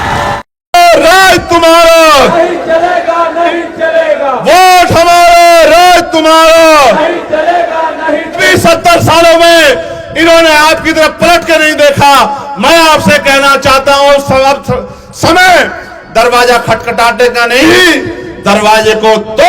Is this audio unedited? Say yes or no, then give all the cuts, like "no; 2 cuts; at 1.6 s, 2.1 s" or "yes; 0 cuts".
no; 2 cuts; at 0.7 s, 8.5 s